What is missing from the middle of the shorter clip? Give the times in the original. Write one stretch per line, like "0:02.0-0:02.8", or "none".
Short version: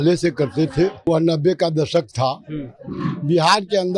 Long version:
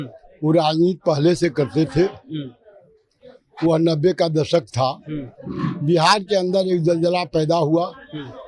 0:02.3-0:03.7